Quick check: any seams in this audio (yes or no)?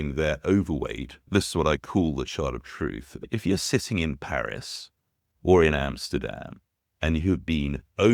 yes